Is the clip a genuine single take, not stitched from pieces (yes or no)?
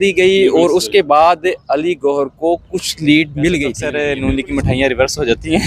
no